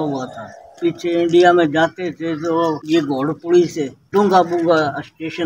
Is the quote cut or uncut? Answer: cut